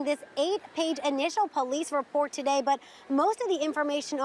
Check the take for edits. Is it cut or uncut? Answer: uncut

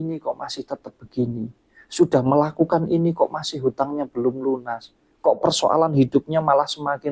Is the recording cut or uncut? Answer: uncut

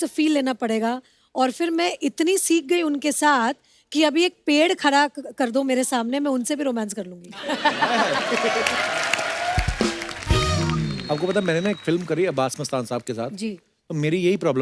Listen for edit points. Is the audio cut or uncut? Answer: uncut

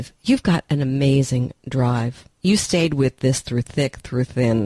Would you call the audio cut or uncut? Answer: uncut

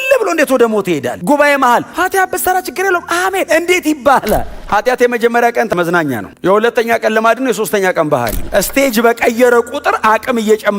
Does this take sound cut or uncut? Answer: cut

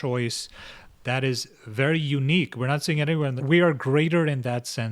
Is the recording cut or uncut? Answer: cut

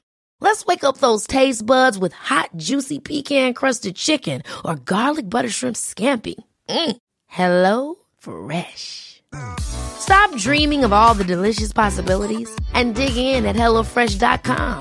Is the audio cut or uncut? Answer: uncut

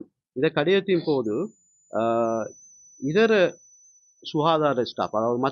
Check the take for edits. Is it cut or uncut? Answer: uncut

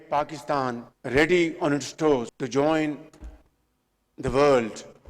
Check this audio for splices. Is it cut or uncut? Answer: cut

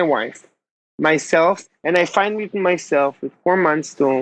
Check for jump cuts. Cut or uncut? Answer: cut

